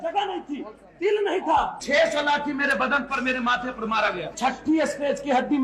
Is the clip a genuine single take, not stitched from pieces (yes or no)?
no